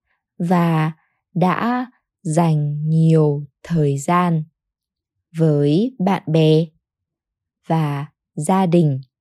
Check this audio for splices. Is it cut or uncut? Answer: uncut